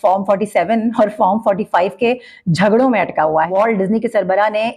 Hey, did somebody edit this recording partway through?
yes; 1 cut; at 3.5 s

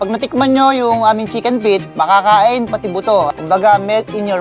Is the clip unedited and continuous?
yes; 0 cuts

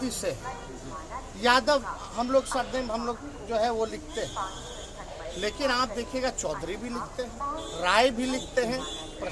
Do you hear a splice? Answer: no; 0 cuts

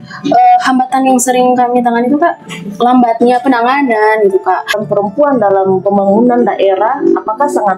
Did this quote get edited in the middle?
yes; 1 cut; at 4.8 s

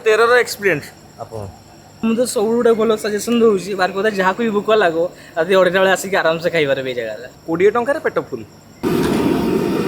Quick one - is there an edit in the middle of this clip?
no; 0 cuts

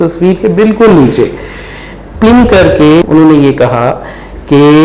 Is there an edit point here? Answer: yes; 1 cut; at 3.1 s

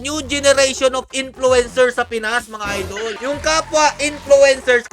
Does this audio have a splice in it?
yes; 1 cut; at 3.2 s

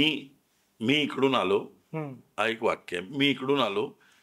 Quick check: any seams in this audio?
no; 0 cuts

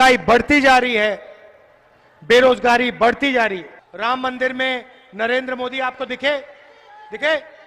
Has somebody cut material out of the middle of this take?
yes; 1 cut; at 3.8 s

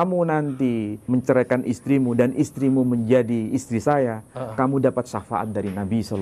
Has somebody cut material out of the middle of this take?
yes; 1 cut; at 1.1 s

